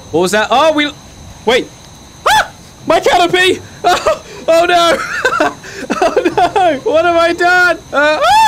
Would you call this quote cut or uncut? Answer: uncut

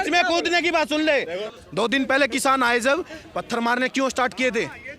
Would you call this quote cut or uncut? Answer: cut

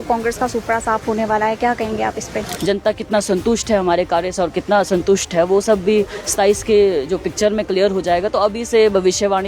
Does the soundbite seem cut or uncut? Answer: cut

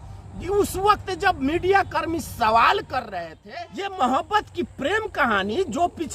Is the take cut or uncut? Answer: cut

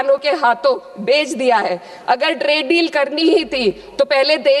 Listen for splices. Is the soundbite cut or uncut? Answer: uncut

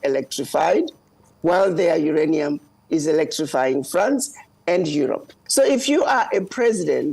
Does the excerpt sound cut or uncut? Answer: cut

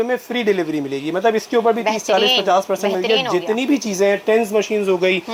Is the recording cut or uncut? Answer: uncut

